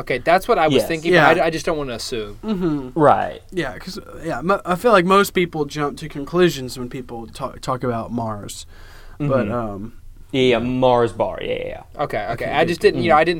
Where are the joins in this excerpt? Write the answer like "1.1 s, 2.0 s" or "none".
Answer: none